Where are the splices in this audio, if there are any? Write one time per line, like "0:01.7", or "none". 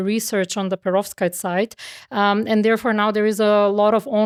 none